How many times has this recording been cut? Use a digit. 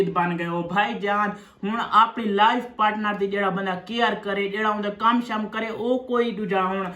0